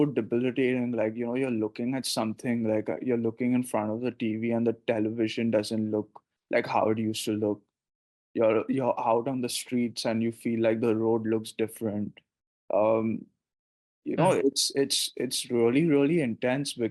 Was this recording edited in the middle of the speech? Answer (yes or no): no